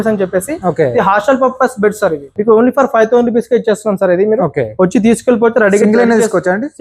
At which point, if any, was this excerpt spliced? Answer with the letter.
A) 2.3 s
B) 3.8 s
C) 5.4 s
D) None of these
A